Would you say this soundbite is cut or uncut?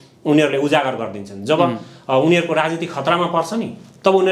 uncut